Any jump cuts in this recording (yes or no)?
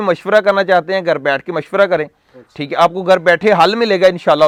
no